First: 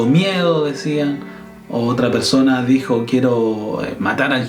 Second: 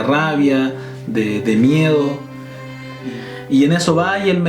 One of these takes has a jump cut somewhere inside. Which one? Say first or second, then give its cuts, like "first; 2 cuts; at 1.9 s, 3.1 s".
second; 1 cut; at 2.9 s